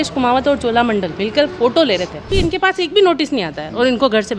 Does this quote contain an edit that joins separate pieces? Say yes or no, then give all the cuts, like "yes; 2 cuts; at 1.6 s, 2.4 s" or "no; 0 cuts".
yes; 1 cut; at 2.3 s